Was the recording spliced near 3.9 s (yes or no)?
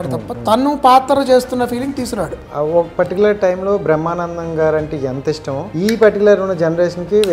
no